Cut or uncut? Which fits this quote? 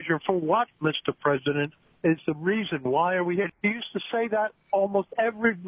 cut